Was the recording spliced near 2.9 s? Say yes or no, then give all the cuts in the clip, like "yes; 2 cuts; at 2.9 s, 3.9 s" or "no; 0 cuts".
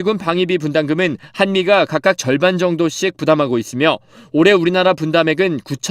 yes; 1 cut; at 2.9 s